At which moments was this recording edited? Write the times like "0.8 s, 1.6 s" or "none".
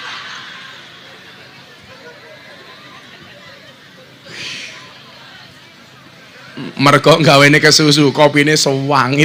none